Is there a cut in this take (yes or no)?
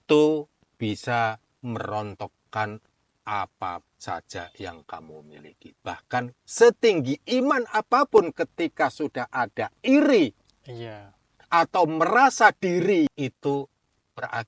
yes